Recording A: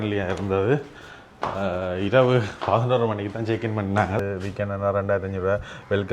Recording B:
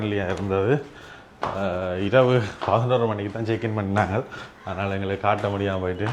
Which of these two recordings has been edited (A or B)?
A